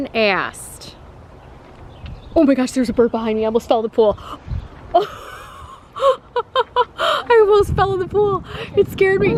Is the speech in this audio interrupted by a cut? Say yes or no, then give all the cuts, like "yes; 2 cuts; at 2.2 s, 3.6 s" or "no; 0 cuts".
no; 0 cuts